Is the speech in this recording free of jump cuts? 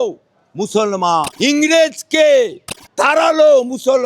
no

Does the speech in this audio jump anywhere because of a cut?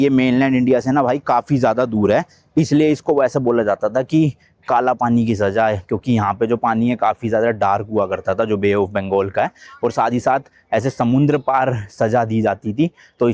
no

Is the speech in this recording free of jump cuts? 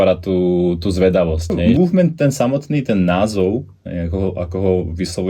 no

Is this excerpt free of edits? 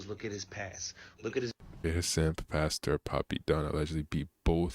no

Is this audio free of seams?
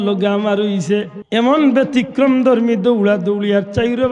no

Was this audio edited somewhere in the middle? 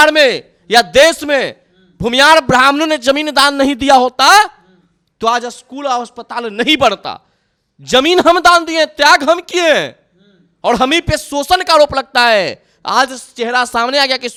no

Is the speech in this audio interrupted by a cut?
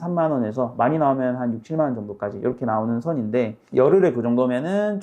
no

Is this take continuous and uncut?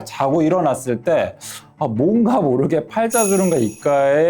yes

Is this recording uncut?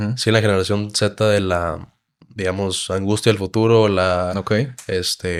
yes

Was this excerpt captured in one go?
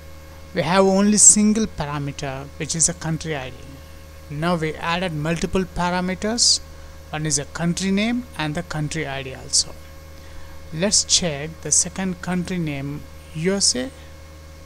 yes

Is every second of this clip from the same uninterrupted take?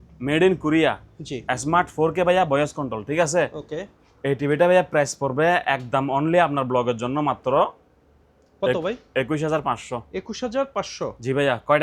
yes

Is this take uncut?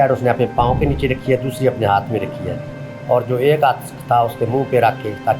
yes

